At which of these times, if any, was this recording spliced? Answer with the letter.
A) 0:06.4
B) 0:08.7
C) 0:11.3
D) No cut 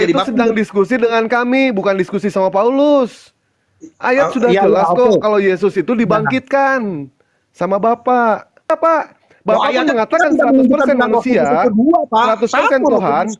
B